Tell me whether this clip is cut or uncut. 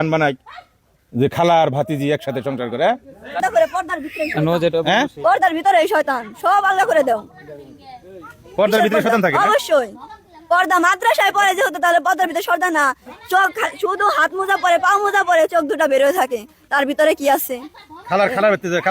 cut